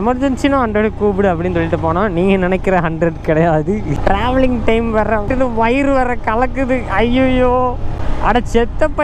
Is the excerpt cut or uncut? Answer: cut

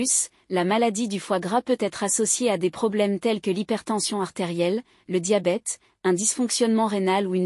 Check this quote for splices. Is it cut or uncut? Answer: uncut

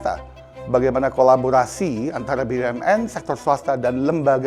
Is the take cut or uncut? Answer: uncut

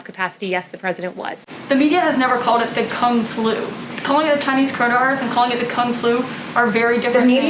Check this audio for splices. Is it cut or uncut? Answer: cut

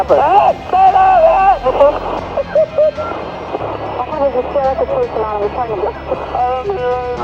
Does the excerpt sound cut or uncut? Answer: uncut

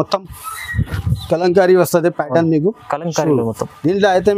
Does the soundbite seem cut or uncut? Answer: uncut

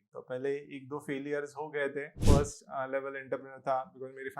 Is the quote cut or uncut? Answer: cut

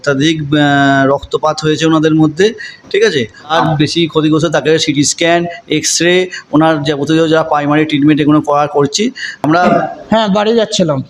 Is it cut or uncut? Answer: cut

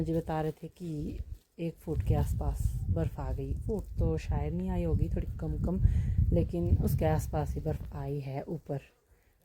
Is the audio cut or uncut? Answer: uncut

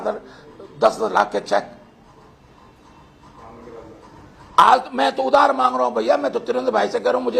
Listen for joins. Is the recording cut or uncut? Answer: uncut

